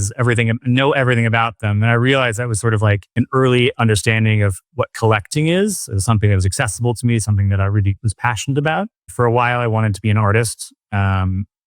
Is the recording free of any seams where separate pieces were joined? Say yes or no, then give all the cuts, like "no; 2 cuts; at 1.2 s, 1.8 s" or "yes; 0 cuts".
no; 2 cuts; at 3.1 s, 9.1 s